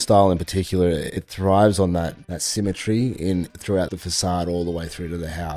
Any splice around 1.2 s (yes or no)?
yes